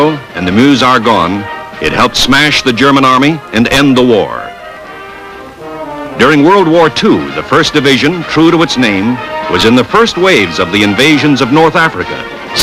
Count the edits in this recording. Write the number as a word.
one